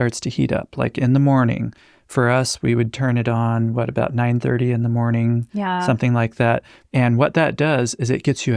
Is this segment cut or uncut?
cut